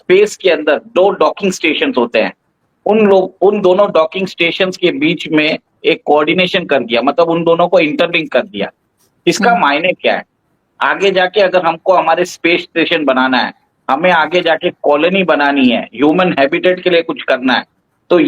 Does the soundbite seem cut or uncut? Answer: uncut